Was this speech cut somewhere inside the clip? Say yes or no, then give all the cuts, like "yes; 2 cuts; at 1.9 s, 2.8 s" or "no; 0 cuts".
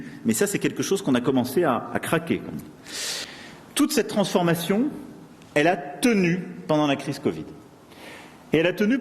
yes; 1 cut; at 3.1 s